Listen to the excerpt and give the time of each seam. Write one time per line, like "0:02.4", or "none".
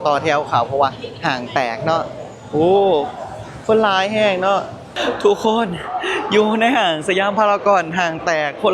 0:04.8